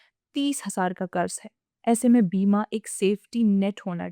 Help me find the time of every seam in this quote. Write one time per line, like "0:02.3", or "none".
none